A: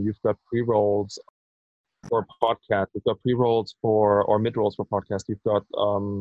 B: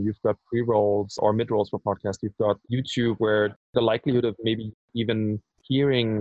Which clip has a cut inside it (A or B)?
B